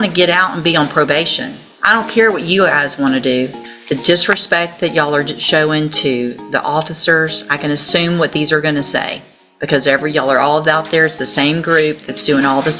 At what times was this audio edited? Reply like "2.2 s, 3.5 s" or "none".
3.7 s